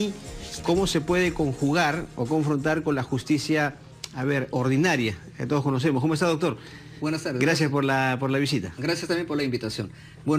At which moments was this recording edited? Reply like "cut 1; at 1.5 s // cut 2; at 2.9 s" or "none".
cut 1; at 2.8 s